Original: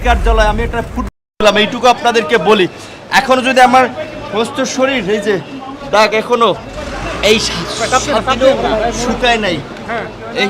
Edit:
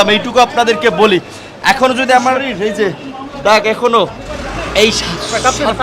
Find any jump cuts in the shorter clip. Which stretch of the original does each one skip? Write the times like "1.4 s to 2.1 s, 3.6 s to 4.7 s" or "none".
3.9 s to 4.9 s